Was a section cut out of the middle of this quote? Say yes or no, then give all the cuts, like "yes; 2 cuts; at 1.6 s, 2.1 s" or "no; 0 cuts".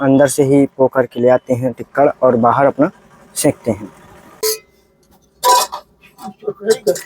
yes; 1 cut; at 4.3 s